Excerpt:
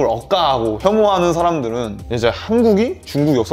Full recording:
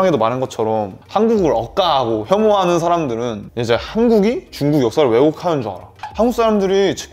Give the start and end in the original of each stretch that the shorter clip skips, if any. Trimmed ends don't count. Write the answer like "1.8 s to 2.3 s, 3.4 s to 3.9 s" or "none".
none